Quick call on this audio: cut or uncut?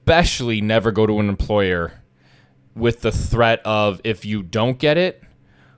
uncut